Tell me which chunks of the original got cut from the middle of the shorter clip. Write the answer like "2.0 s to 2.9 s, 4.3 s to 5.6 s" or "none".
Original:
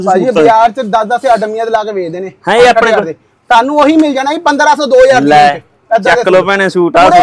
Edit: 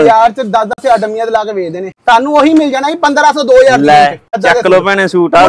2.2 s to 3.3 s, 5.7 s to 5.9 s